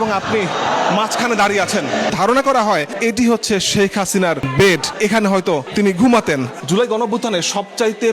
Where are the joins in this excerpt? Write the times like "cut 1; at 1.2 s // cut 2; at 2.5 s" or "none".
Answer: cut 1; at 2.1 s // cut 2; at 6.6 s